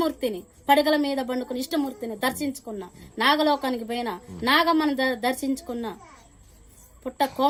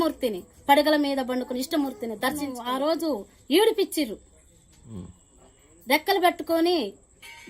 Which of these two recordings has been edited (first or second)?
second